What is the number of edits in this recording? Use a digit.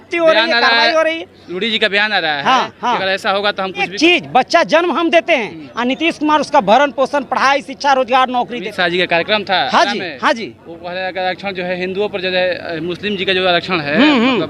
2